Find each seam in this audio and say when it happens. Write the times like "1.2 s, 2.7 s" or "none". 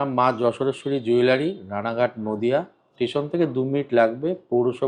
none